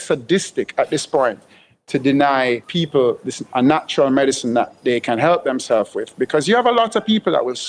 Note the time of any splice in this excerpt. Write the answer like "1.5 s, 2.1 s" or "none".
2.7 s